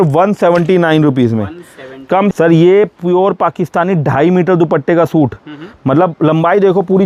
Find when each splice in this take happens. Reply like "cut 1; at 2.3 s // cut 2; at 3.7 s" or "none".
cut 1; at 2.3 s